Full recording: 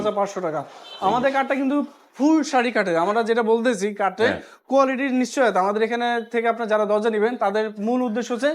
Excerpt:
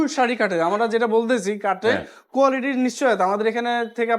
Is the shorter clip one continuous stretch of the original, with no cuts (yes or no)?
yes